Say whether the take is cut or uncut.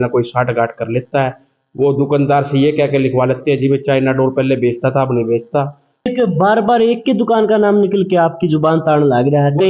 cut